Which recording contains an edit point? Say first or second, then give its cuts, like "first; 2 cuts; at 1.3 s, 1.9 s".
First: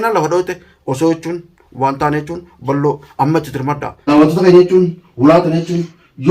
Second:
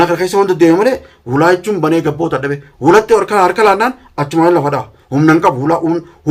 first; 1 cut; at 4.0 s